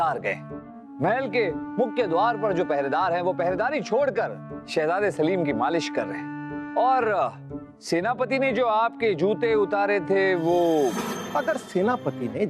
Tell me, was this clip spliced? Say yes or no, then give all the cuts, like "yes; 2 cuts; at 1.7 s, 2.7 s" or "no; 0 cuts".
yes; 1 cut; at 11.2 s